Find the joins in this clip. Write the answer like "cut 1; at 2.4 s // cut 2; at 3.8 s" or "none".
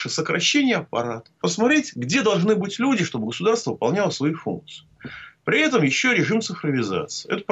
cut 1; at 1.4 s